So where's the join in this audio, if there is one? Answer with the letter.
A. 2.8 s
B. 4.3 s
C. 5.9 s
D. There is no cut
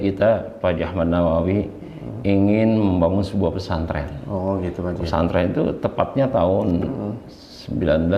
D